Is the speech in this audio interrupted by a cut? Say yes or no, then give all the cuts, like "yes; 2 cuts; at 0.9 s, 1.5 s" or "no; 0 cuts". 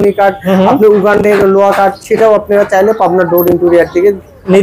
no; 0 cuts